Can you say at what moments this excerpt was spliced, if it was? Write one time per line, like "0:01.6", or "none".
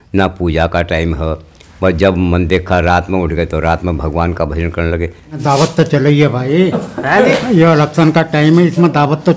0:05.4